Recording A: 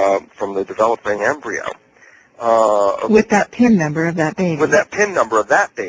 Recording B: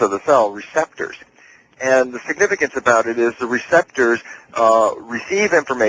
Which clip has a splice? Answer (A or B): B